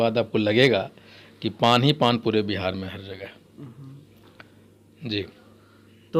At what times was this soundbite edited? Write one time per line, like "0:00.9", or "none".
none